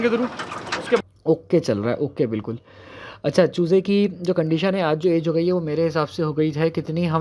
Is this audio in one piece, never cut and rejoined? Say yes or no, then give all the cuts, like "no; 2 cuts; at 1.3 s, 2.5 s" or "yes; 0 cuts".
no; 1 cut; at 1.0 s